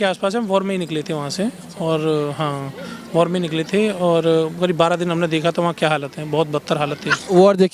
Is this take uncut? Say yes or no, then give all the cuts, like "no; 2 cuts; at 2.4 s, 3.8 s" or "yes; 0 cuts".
yes; 0 cuts